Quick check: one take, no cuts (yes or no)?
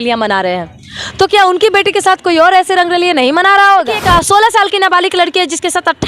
no